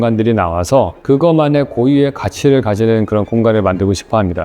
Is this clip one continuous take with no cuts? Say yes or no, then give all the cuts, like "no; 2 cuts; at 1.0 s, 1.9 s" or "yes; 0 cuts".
no; 1 cut; at 1.0 s